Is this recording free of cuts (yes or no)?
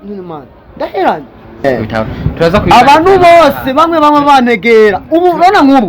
no